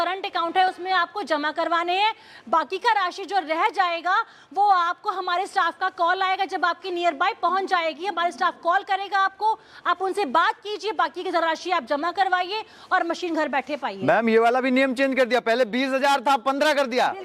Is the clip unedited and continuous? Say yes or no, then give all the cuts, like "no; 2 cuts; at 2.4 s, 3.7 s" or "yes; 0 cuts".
yes; 0 cuts